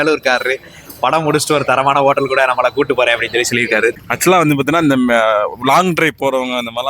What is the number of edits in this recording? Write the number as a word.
one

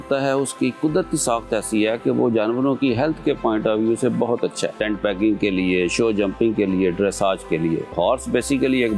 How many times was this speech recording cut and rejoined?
two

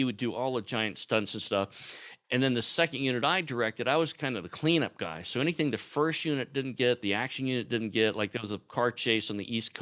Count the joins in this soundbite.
one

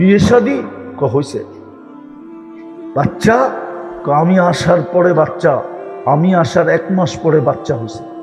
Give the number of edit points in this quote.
zero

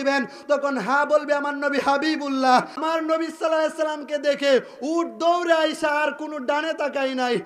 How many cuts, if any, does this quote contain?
one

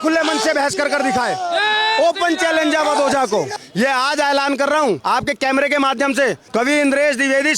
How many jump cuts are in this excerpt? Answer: three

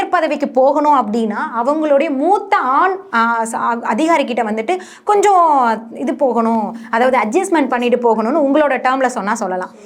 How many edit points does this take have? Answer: zero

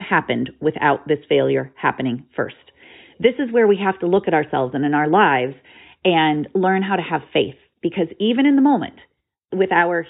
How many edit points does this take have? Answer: zero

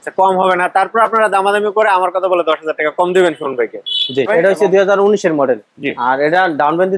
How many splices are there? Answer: one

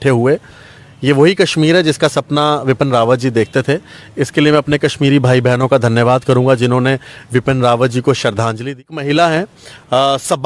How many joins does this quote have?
one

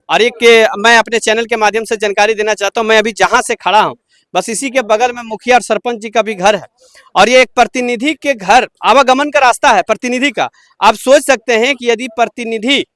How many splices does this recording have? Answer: zero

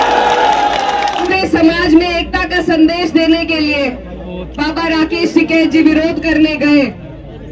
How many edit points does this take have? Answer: one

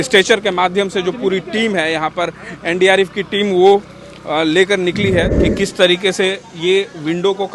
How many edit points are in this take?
one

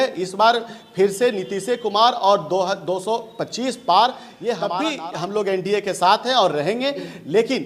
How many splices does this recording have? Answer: one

